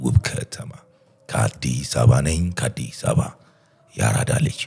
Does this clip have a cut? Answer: no; 0 cuts

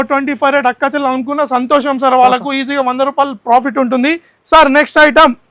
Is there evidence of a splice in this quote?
no; 0 cuts

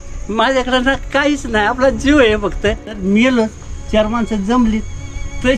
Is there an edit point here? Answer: yes; 1 cut; at 2.9 s

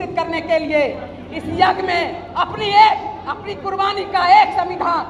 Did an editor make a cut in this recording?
no; 0 cuts

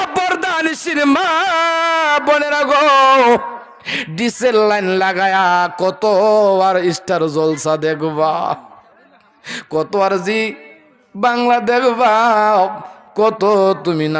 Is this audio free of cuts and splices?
yes; 0 cuts

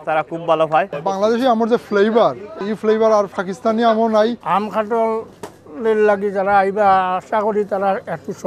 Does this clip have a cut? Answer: yes; 3 cuts; at 0.9 s, 2.6 s, 4.4 s

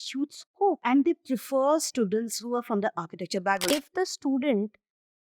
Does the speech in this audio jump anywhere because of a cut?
yes; 2 cuts; at 0.8 s, 3.6 s

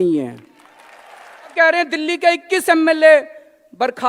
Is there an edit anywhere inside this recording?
yes; 1 cut; at 1.5 s

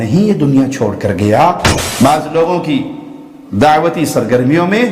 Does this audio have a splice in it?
yes; 1 cut; at 1.7 s

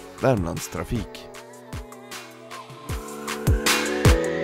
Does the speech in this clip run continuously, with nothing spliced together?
no; 1 cut; at 1.1 s

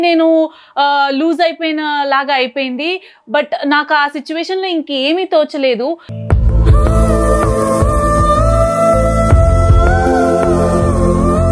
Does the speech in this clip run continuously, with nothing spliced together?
yes; 0 cuts

